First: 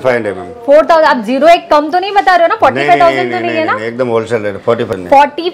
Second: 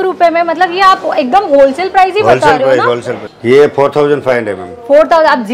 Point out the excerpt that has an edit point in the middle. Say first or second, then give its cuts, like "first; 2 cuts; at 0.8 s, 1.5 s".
second; 1 cut; at 3.3 s